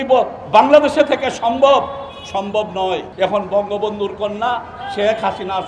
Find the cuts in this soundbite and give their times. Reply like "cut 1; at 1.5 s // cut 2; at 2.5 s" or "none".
cut 1; at 3.1 s